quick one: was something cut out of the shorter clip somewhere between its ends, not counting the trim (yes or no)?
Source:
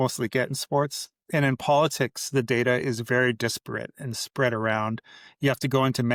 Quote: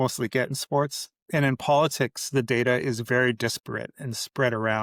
no